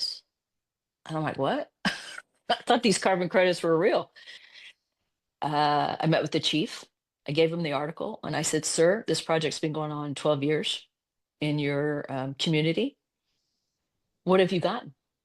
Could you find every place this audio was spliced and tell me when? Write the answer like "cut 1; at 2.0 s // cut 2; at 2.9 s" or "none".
cut 1; at 4.4 s